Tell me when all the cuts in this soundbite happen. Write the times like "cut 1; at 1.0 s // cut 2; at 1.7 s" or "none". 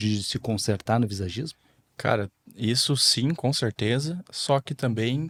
none